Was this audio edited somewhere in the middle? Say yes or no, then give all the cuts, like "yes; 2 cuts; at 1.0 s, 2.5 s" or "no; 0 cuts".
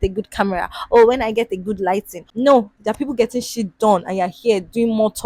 yes; 1 cut; at 2.2 s